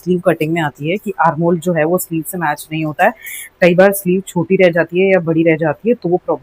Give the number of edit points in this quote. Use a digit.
0